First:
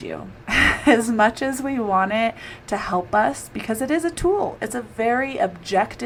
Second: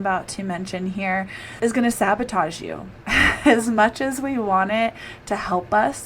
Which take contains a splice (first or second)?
second